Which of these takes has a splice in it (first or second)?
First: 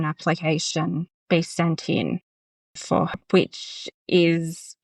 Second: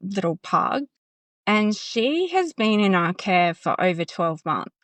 first